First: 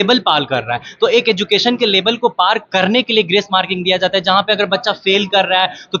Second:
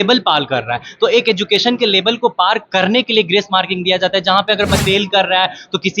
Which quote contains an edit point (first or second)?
second